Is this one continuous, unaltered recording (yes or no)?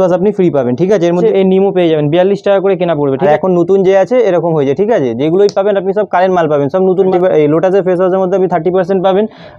no